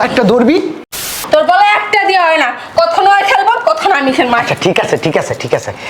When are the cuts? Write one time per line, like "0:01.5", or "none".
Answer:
0:01.0